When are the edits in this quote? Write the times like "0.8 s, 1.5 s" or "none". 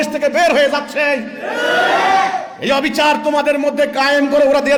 none

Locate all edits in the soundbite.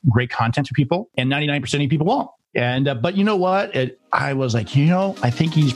1.1 s, 2.4 s

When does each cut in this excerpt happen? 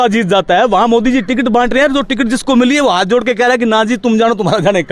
none

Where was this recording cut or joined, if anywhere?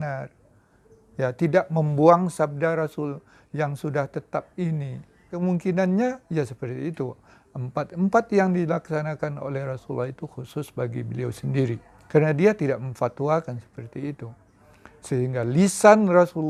none

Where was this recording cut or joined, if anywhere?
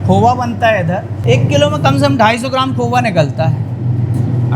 1.2 s

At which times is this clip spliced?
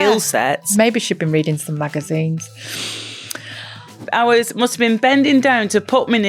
0.7 s, 4.0 s

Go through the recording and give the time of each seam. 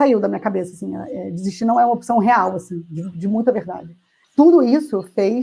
4.2 s

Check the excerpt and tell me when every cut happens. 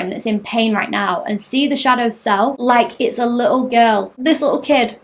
2.6 s, 4.1 s

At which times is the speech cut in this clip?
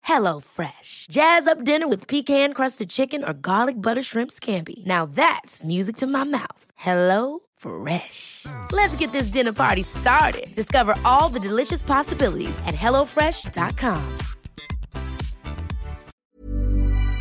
16.2 s

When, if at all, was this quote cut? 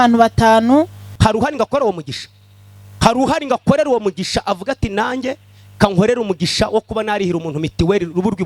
1.0 s

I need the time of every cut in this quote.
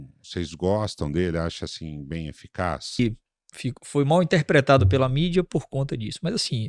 3.0 s

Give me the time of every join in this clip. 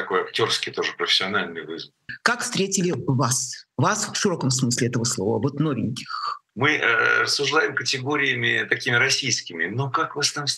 2.1 s, 6.4 s

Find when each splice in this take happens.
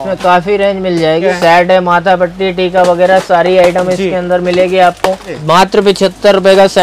1.3 s, 5.4 s

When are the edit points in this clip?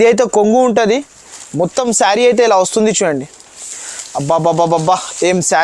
none

